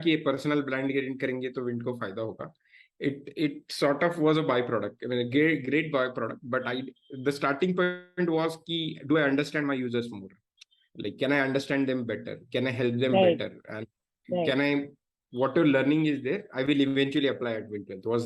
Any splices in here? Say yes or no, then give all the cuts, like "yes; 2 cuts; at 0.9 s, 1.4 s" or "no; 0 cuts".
no; 0 cuts